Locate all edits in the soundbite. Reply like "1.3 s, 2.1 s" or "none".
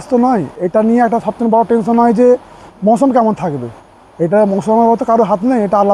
none